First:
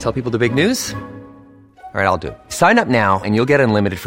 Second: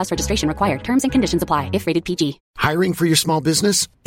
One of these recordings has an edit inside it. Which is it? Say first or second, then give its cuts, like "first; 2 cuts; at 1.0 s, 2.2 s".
second; 1 cut; at 2.5 s